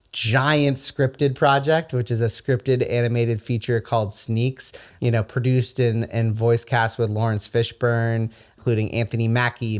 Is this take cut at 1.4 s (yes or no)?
no